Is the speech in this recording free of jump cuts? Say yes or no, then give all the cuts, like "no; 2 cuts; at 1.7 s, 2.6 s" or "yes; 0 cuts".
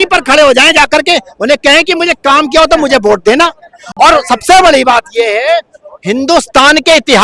yes; 0 cuts